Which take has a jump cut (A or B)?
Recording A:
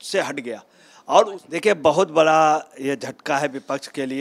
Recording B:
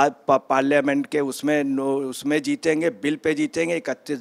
A